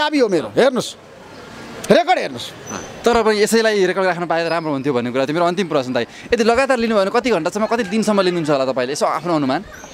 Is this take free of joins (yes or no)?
yes